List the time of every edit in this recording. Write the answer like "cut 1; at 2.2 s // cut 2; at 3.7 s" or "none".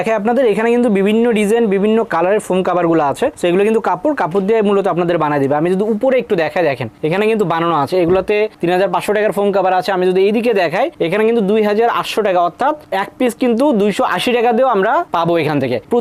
none